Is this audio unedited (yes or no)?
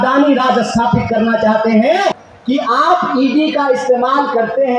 no